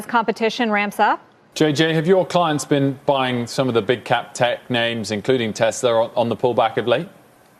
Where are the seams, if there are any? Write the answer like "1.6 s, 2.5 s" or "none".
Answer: 1.4 s